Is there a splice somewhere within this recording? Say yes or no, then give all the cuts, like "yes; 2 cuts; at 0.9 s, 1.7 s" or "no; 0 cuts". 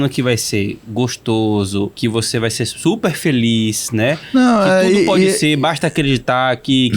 yes; 1 cut; at 1.9 s